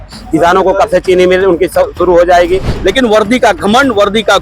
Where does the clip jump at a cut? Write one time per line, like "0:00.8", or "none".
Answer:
0:02.7